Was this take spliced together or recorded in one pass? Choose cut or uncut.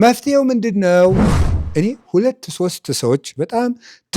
cut